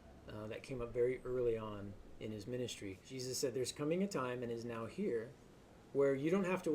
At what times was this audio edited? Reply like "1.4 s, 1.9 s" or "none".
3.1 s